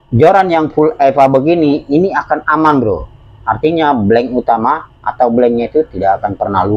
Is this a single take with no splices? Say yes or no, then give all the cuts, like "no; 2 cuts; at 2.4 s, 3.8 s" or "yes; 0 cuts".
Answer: yes; 0 cuts